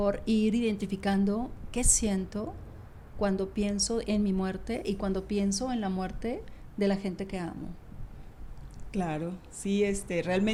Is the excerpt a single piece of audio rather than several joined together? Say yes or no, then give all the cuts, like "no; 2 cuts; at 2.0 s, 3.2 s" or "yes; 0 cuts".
yes; 0 cuts